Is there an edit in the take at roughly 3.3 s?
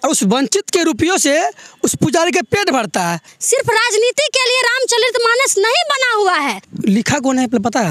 yes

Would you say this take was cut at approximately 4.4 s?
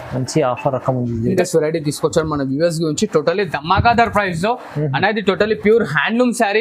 no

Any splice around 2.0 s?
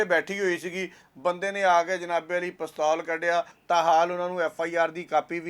no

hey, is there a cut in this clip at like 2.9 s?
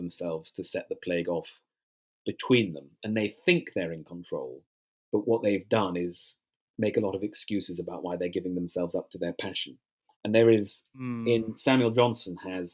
no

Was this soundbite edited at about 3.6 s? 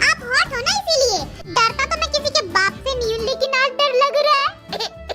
no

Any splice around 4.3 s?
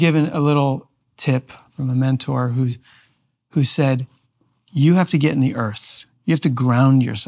no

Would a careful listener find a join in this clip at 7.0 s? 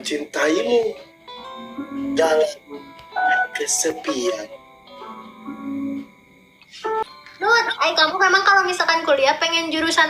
yes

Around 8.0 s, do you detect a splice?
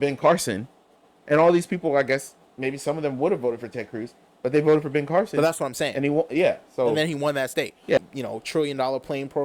yes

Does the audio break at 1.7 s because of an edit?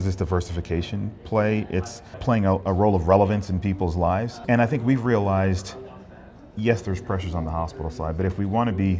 no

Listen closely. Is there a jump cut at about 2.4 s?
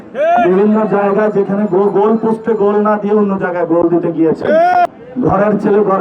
no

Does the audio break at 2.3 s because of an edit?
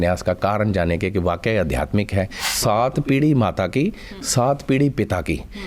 yes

